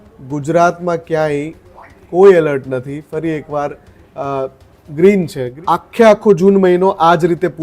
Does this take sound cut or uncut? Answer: cut